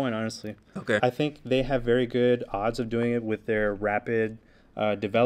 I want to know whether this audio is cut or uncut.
cut